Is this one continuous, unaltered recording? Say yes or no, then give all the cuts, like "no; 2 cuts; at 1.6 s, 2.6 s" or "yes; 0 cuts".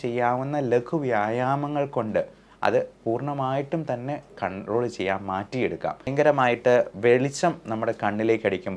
no; 1 cut; at 6.1 s